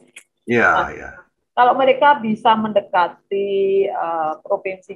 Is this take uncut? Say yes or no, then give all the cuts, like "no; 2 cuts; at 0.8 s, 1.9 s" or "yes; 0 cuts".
yes; 0 cuts